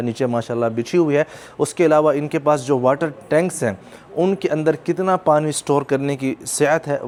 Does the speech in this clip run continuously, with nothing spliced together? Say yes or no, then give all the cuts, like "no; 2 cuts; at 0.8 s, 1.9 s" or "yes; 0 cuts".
yes; 0 cuts